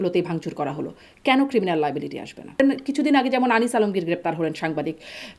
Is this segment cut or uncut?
cut